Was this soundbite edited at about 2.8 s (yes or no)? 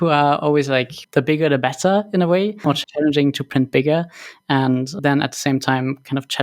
yes